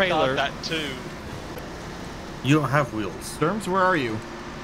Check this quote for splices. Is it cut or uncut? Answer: uncut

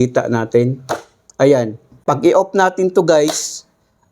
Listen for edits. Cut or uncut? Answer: cut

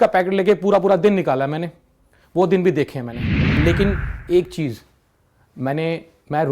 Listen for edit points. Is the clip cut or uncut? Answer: cut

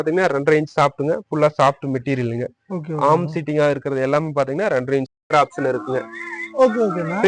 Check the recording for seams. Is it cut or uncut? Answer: cut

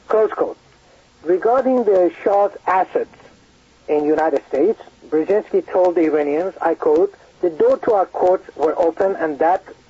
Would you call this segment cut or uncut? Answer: cut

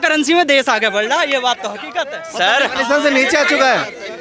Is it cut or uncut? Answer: uncut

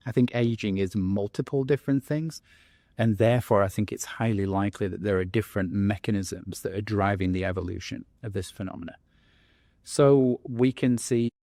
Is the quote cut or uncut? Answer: uncut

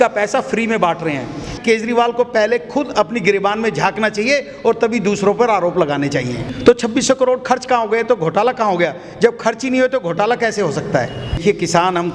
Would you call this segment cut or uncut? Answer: cut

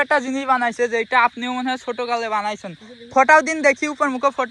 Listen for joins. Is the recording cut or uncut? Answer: uncut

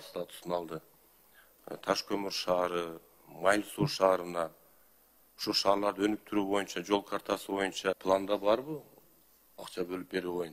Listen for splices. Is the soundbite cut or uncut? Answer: cut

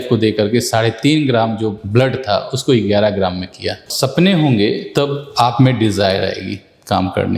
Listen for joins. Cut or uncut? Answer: cut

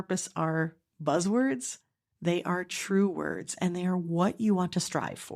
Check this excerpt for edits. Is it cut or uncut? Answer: uncut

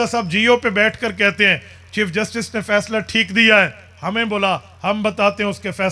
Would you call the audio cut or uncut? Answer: uncut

